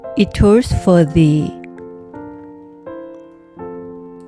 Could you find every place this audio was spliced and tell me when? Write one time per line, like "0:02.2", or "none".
0:01.5